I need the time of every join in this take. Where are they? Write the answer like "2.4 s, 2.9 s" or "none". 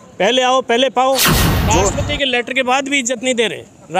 1.6 s